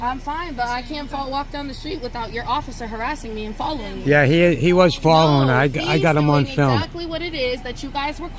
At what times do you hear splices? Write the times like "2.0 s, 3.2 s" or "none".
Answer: none